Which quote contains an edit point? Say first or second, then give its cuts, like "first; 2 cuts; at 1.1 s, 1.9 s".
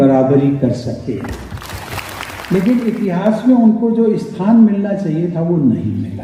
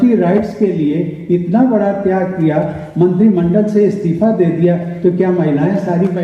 first; 1 cut; at 2.3 s